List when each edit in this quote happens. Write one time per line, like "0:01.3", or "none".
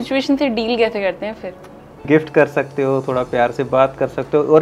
0:02.0